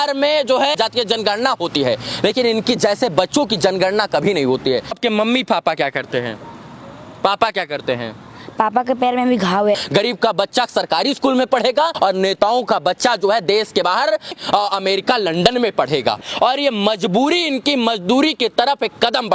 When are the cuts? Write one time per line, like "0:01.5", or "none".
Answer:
0:00.8
0:05.0
0:09.8
0:11.9
0:14.3
0:16.3